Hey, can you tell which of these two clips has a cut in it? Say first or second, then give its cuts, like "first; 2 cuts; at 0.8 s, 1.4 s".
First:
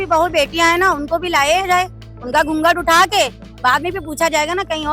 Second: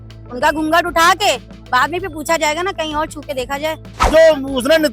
second; 1 cut; at 3.9 s